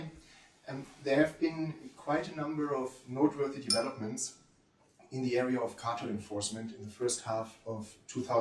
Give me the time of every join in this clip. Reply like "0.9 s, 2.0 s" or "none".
6.7 s